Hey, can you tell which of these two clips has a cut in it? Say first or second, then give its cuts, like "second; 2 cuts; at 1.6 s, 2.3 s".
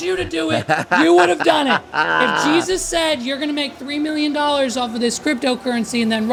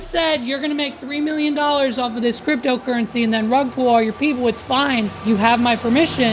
second; 1 cut; at 5.1 s